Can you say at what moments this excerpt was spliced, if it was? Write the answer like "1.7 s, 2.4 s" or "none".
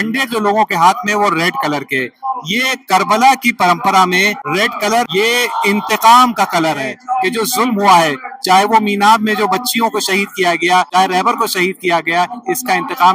4.7 s, 7.0 s, 10.9 s